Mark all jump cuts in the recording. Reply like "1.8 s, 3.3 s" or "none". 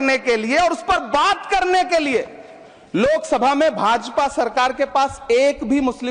none